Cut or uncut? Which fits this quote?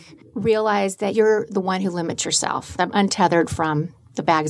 cut